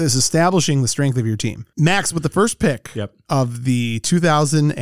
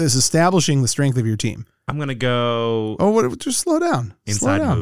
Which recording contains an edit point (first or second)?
first